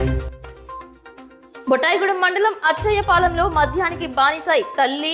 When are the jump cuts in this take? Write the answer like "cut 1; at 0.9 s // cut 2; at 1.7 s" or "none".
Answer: cut 1; at 1.2 s